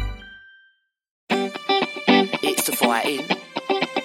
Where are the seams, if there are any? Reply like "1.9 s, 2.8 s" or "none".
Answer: 1.2 s